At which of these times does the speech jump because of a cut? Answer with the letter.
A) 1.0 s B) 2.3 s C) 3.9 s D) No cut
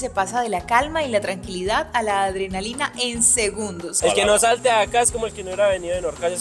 C